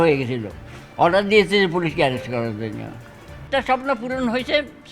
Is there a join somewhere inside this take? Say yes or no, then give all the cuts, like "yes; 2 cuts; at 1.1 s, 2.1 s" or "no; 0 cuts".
yes; 1 cut; at 3.5 s